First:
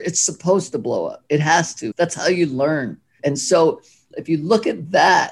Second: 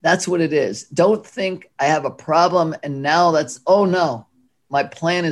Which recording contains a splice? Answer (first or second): first